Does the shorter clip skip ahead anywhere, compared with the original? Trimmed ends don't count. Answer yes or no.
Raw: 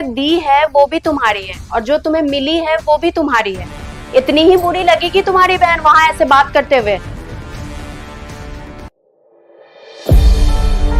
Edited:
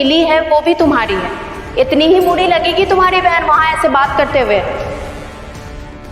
yes